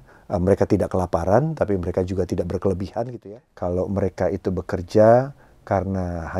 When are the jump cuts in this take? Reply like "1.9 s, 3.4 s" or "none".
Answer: 3.1 s

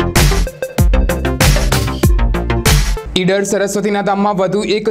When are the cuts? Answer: 2.9 s

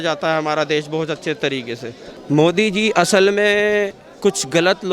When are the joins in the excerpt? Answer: 2.1 s

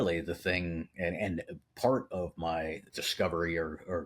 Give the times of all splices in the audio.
3.0 s

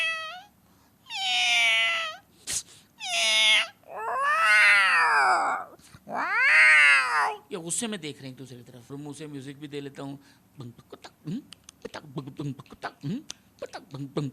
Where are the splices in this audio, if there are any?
8.9 s

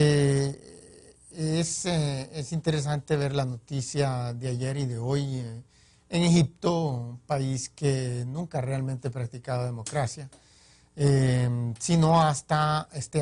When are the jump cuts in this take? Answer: 11.8 s

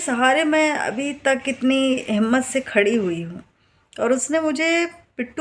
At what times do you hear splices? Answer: none

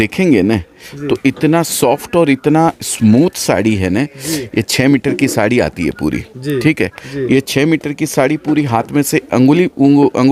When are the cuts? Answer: none

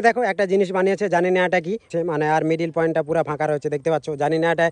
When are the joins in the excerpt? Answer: 1.9 s

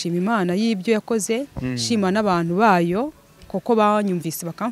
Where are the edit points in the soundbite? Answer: none

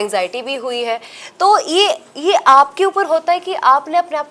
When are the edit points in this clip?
none

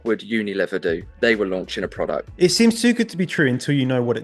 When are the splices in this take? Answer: 1.1 s, 2.3 s

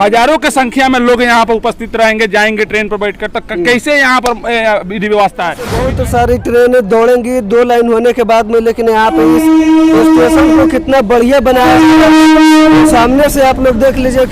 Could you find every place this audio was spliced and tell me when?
5.9 s

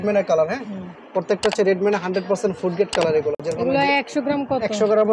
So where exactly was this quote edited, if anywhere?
none

